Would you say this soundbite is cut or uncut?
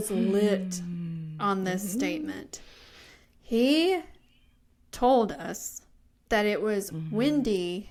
uncut